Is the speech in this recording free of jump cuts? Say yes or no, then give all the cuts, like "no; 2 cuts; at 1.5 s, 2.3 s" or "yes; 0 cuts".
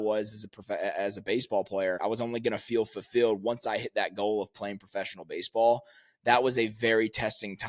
no; 1 cut; at 2.0 s